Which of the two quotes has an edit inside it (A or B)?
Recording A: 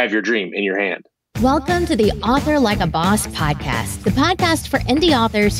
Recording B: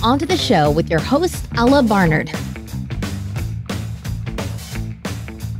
A